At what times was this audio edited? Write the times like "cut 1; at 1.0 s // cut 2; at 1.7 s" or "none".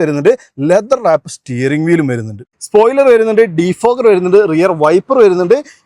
cut 1; at 2.5 s

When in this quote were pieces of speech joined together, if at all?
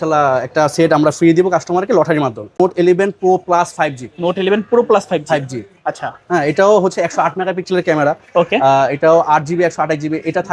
cut 1; at 2.6 s

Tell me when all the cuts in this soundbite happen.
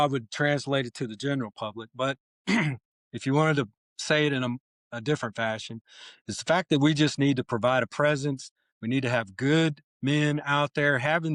none

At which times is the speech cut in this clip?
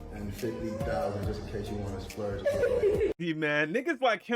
cut 1; at 3.1 s

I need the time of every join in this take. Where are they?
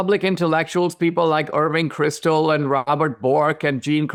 none

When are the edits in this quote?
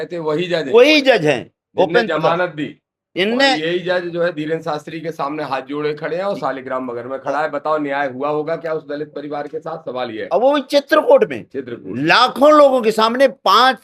none

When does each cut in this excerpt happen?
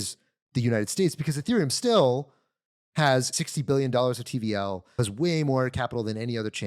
cut 1; at 3.3 s // cut 2; at 5.0 s

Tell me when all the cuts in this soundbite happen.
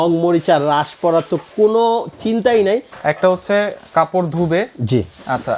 cut 1; at 2.9 s

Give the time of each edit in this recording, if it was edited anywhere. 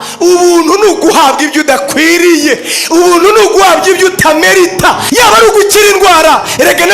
cut 1; at 5.0 s

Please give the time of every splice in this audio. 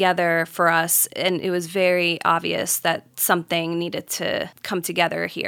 cut 1; at 4.6 s

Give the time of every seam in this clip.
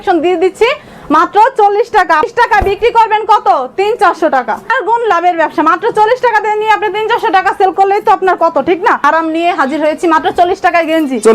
cut 1; at 2.3 s // cut 2; at 4.8 s // cut 3; at 9.0 s

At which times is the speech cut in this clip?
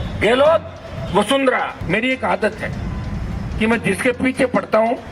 cut 1; at 1.7 s

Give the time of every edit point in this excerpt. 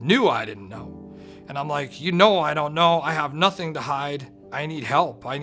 cut 1; at 4.4 s

